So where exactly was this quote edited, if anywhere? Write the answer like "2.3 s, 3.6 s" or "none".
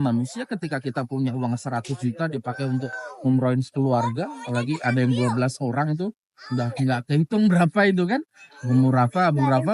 none